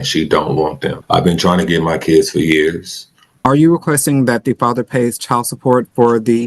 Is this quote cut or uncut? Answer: cut